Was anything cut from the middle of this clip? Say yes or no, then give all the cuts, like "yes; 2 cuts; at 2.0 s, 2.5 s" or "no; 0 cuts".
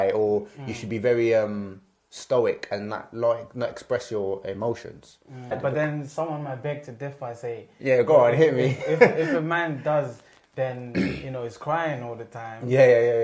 yes; 1 cut; at 5.5 s